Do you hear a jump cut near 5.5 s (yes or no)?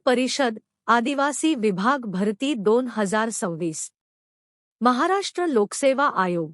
yes